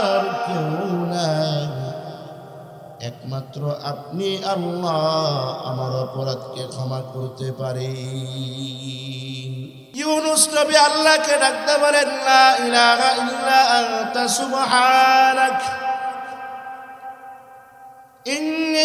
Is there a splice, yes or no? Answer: yes